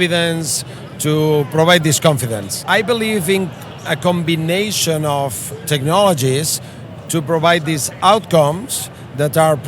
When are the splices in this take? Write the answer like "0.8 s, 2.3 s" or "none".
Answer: 2.5 s